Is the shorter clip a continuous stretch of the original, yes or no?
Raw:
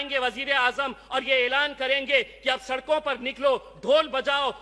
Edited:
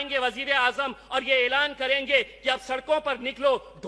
yes